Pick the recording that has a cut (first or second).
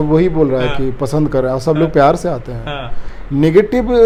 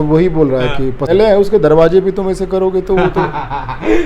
second